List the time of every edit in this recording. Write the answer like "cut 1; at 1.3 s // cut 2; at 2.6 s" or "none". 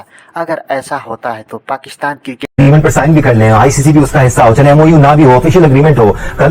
cut 1; at 2.4 s